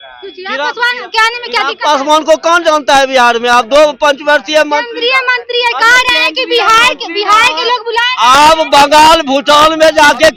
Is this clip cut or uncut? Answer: uncut